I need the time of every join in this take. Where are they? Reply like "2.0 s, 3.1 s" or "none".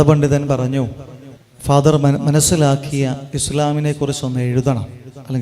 none